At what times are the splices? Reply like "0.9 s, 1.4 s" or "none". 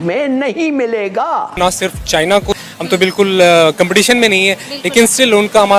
1.6 s, 2.6 s

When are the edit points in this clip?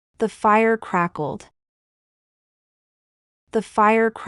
none

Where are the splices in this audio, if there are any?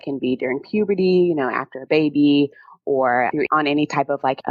none

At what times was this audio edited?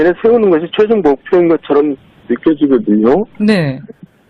3.0 s

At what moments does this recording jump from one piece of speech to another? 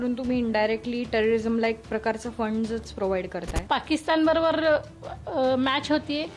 3.5 s

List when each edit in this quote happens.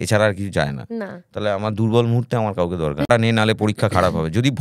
3.1 s

